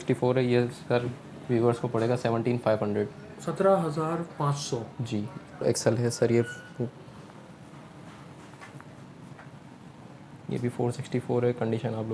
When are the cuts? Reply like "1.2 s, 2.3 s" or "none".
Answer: 5.6 s